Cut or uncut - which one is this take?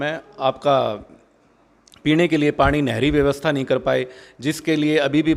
uncut